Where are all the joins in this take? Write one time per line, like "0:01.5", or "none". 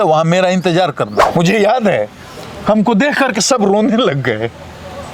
0:01.2